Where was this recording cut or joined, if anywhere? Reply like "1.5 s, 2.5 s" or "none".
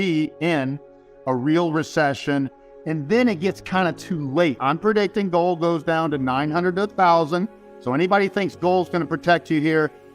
4.6 s, 7.7 s